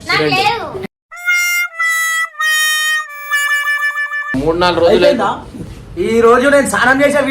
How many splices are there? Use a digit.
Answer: 1